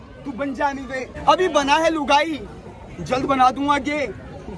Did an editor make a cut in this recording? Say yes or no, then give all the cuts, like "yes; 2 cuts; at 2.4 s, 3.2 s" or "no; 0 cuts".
yes; 1 cut; at 1.1 s